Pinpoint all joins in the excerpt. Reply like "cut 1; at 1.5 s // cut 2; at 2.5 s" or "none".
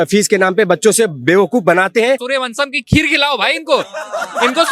cut 1; at 2.2 s